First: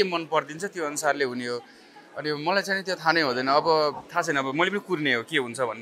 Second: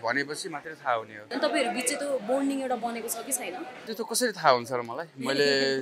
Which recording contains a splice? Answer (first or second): second